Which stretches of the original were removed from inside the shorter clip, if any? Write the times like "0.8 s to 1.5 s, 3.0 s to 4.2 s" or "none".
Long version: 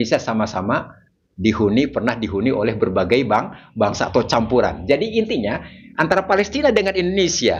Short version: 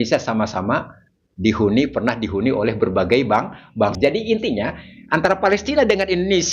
3.9 s to 4.8 s